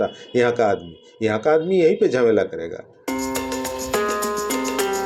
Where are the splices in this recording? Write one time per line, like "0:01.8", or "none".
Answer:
none